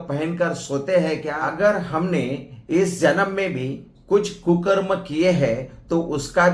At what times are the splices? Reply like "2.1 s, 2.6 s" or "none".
1.4 s

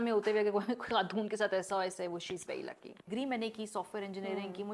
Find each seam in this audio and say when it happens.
3.1 s

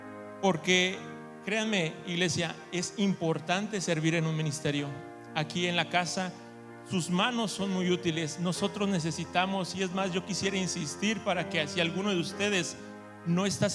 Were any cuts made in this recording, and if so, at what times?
none

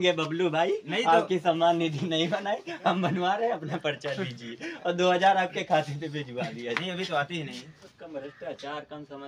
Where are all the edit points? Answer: 7.8 s

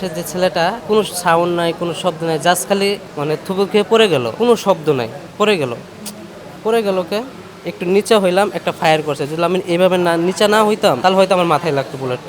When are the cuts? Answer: 0.8 s, 4.3 s, 11.0 s

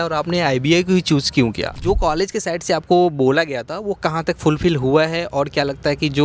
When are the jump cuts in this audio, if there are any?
1.7 s

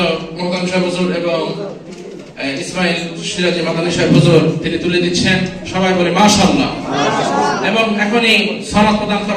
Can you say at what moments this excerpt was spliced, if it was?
none

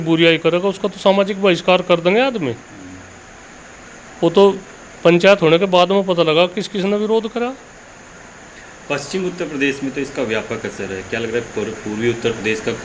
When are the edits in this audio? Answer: none

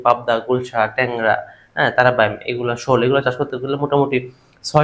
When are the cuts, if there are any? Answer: none

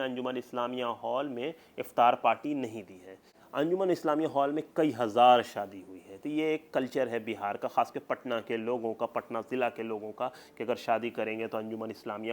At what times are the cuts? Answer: 3.3 s

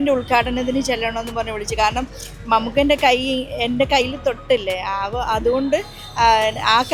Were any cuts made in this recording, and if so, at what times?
none

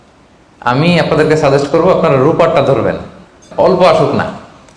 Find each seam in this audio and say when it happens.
3.5 s

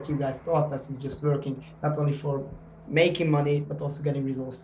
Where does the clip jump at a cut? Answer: none

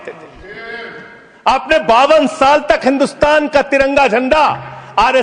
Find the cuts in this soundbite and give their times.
none

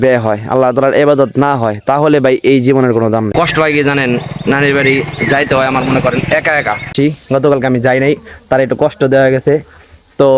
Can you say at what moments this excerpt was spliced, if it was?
3.3 s, 6.9 s

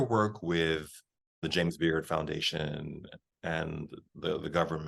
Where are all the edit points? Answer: 1.0 s

